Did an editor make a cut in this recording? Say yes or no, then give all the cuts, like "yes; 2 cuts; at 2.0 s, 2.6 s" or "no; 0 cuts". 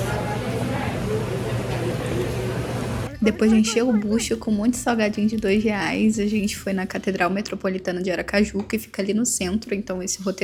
no; 0 cuts